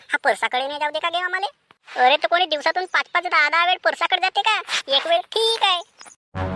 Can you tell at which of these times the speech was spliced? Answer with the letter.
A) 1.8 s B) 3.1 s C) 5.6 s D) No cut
D